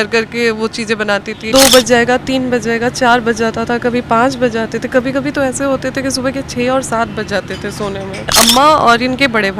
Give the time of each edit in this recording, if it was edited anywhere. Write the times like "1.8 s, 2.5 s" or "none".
1.4 s, 8.3 s